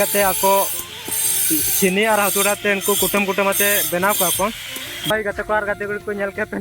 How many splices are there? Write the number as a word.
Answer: one